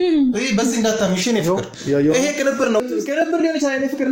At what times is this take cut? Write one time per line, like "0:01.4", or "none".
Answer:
0:02.9